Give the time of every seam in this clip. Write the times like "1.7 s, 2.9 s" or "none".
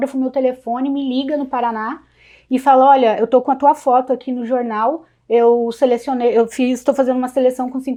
none